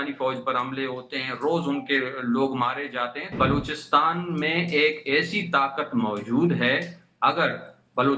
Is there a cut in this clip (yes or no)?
yes